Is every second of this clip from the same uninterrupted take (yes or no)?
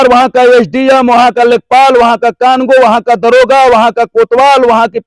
yes